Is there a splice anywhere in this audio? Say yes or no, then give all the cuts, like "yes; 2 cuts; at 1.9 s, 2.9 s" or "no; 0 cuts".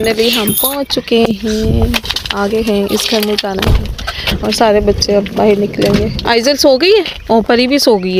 no; 0 cuts